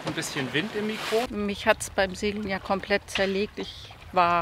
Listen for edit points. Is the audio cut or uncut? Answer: cut